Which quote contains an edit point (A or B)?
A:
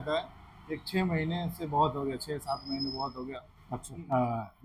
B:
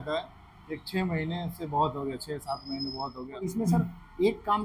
B